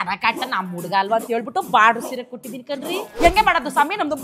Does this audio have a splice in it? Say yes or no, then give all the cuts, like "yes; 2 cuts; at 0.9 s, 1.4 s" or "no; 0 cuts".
yes; 1 cut; at 3.0 s